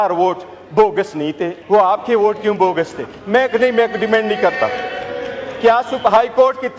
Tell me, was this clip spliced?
yes; 1 cut; at 1.5 s

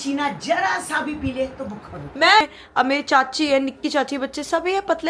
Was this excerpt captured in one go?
no; 1 cut; at 2.4 s

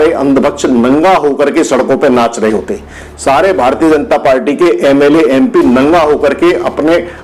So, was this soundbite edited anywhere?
no; 0 cuts

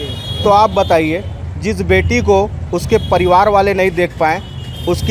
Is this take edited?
no; 0 cuts

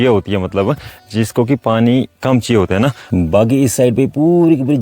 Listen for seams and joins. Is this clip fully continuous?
no; 1 cut; at 3.0 s

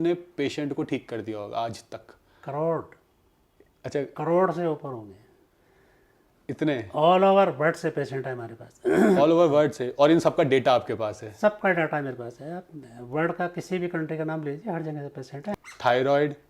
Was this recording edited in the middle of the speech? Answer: yes; 1 cut; at 15.4 s

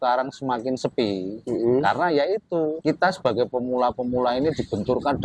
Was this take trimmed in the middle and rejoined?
yes; 2 cuts; at 1.3 s, 2.8 s

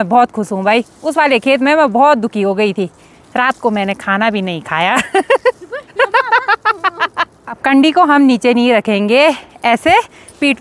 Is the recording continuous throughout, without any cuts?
yes; 0 cuts

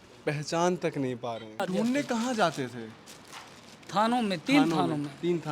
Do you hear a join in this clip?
yes; 1 cut; at 1.6 s

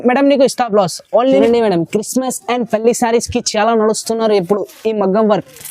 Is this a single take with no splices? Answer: no; 1 cut; at 1.4 s

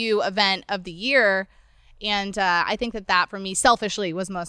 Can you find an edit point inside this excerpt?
no; 0 cuts

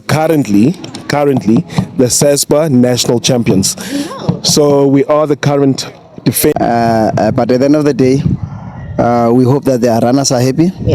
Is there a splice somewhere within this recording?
yes; 1 cut; at 6.5 s

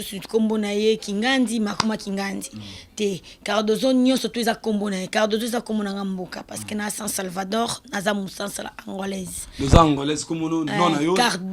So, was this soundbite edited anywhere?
no; 0 cuts

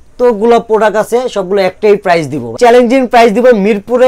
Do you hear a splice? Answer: yes; 1 cut; at 2.6 s

